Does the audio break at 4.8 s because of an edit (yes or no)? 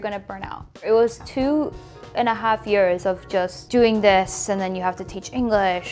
no